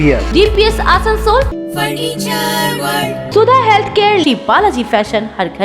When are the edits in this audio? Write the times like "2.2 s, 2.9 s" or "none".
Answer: 1.5 s, 3.3 s